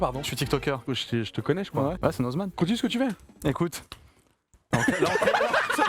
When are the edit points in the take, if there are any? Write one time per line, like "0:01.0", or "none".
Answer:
0:00.8
0:02.5